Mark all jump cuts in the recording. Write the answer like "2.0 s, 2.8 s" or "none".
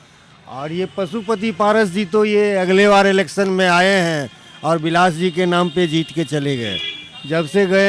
none